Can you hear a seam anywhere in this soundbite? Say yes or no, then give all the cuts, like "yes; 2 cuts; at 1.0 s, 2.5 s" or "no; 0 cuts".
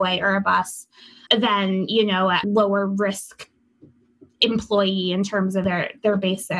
yes; 1 cut; at 5.6 s